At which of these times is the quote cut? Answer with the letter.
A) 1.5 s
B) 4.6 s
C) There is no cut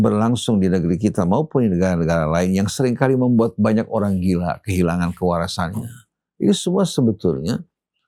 C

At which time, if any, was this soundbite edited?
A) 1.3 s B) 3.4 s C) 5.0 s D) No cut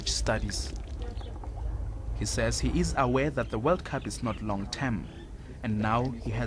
C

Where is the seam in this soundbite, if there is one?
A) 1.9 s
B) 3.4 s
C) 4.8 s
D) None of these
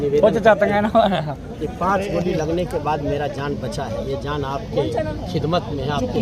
D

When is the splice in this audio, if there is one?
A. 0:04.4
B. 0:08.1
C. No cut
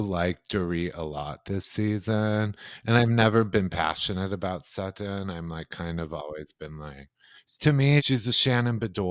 B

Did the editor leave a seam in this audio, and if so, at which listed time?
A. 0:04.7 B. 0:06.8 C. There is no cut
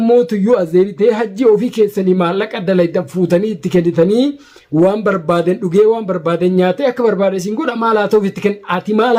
C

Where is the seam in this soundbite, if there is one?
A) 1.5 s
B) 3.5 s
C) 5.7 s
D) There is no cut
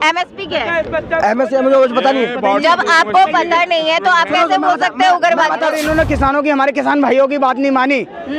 C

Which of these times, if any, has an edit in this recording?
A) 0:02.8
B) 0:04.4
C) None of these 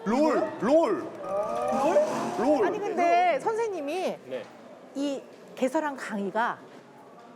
A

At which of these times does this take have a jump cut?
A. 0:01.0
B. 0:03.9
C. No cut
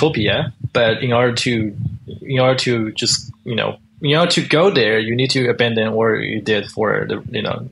C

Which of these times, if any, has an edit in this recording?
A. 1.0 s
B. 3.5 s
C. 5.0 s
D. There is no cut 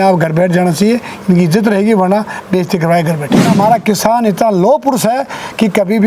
B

